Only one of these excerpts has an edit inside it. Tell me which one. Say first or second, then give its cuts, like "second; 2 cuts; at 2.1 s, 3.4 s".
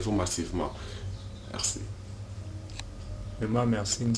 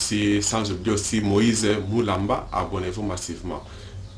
first; 1 cut; at 3.0 s